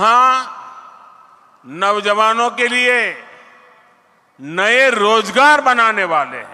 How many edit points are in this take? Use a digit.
0